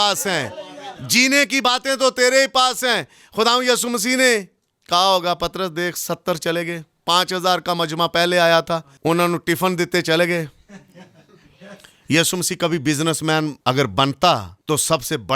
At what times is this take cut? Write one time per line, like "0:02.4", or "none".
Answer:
0:08.9
0:13.5
0:14.5

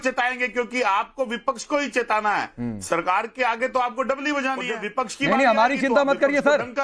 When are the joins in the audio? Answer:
none

